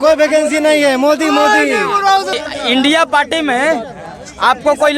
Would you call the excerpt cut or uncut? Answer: cut